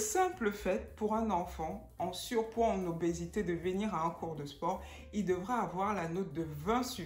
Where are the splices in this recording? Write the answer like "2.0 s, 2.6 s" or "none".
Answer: none